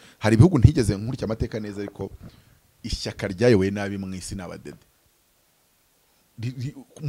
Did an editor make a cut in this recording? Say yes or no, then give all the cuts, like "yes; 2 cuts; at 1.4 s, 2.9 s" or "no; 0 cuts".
no; 0 cuts